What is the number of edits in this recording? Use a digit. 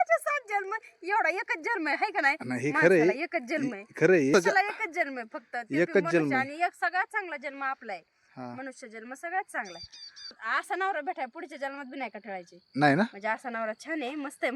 2